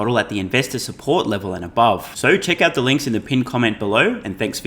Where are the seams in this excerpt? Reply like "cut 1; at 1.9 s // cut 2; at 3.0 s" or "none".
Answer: none